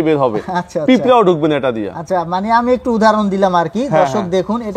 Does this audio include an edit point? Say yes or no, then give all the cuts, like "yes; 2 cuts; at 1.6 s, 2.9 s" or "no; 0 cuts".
no; 0 cuts